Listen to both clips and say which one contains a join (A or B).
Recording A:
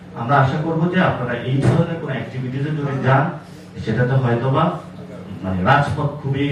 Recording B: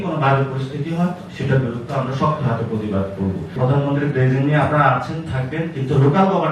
B